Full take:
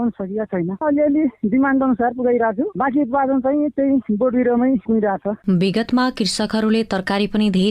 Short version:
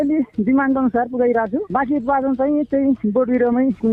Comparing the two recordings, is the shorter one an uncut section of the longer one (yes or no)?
yes